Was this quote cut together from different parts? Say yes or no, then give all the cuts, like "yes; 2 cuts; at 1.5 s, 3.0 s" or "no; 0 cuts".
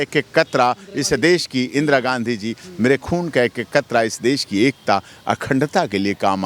no; 0 cuts